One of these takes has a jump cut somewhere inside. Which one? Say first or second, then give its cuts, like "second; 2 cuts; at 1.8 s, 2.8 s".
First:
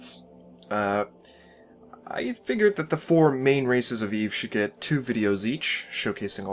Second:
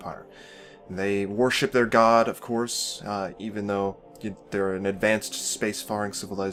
first; 1 cut; at 1.6 s